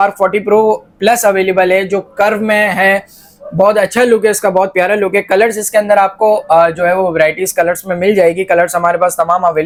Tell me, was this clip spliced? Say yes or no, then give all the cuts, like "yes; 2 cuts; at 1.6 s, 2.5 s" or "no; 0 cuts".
no; 0 cuts